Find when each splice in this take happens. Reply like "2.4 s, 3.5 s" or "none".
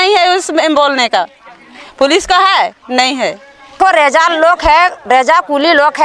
3.8 s